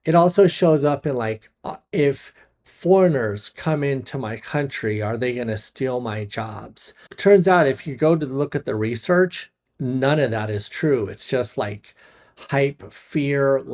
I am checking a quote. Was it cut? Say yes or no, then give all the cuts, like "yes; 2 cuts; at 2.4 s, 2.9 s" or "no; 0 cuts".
yes; 1 cut; at 7.2 s